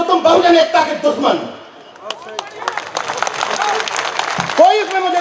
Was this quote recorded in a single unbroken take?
yes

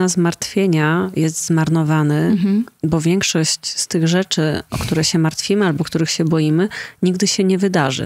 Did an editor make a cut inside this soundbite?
no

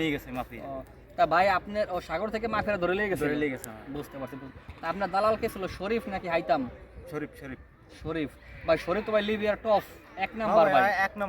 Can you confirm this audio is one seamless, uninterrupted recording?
yes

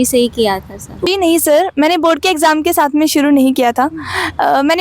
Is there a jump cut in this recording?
yes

